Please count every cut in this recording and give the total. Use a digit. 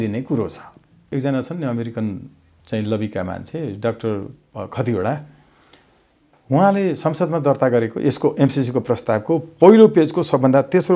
1